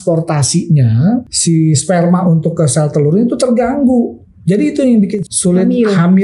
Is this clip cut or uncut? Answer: cut